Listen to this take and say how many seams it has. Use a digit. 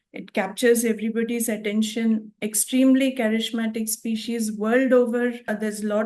0